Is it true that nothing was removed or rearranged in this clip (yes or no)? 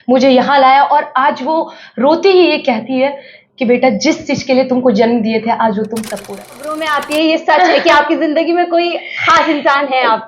no